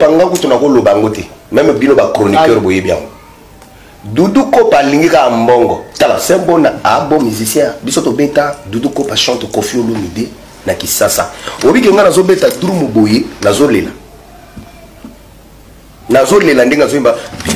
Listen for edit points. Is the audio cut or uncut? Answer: uncut